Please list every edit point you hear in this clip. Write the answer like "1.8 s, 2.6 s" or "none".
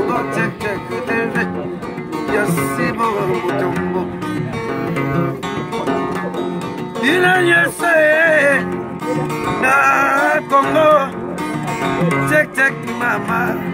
none